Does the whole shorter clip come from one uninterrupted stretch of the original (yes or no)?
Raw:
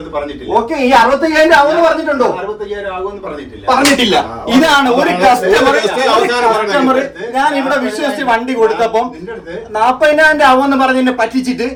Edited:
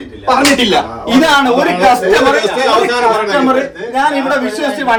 yes